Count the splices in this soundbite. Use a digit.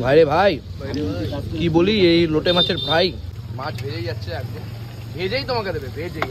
1